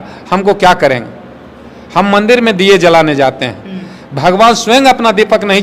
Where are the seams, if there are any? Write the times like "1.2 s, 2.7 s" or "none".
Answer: none